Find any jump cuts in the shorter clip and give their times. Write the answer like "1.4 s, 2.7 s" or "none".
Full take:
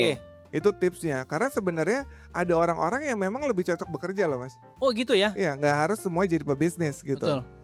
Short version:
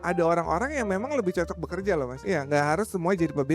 2.2 s